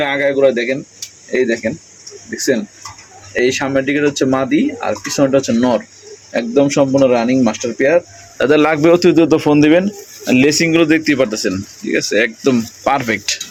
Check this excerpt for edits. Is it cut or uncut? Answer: uncut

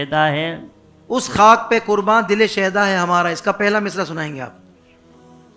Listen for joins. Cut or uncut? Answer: cut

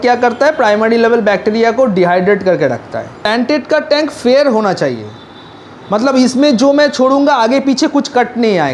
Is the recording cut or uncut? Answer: cut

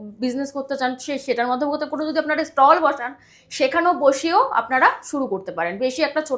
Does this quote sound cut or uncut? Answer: uncut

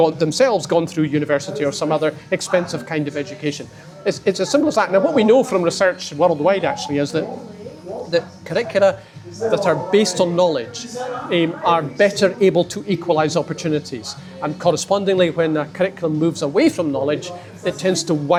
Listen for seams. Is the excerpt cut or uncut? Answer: uncut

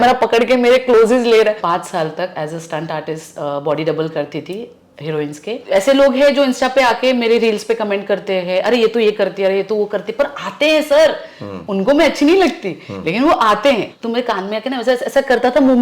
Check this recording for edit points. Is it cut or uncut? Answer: cut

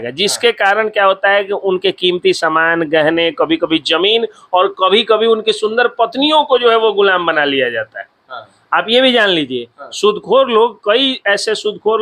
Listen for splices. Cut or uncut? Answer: uncut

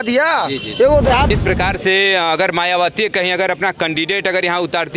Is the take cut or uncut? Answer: cut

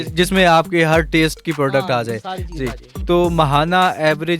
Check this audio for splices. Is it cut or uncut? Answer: cut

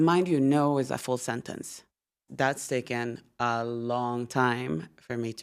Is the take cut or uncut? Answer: cut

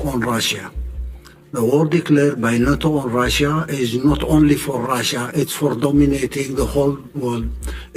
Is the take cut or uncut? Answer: uncut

